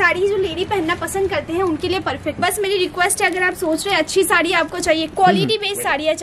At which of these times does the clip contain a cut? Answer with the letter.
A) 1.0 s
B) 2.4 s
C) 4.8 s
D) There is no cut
B